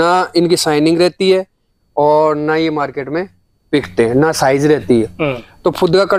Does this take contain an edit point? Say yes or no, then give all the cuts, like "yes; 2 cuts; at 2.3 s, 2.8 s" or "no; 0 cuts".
no; 0 cuts